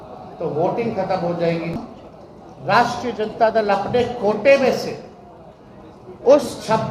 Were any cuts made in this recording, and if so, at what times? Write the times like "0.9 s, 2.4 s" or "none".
1.8 s

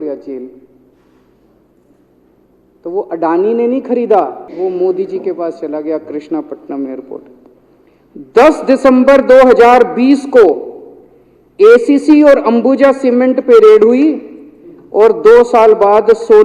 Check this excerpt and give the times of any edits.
4.4 s

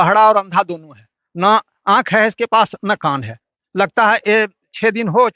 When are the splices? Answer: none

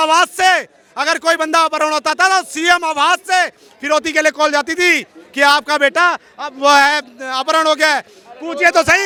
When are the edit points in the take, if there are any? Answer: none

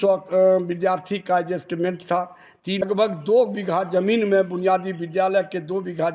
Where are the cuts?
2.8 s

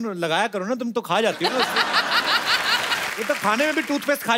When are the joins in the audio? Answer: 3.1 s

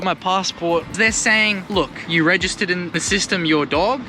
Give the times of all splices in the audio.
0.9 s, 2.0 s, 3.0 s

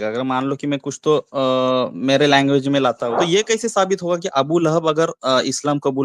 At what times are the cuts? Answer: 3.1 s

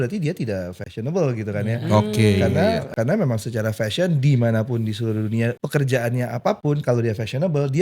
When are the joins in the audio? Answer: 2.9 s, 5.6 s

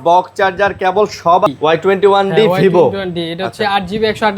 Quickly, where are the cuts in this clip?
1.5 s

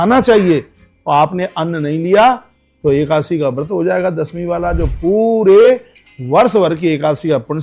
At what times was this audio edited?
none

